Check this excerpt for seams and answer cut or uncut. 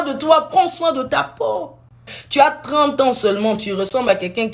cut